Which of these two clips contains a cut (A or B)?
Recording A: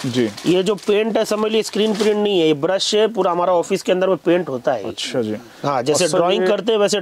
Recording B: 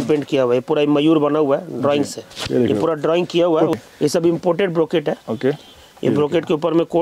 B